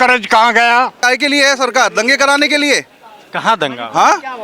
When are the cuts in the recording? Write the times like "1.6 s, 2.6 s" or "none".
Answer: 1.0 s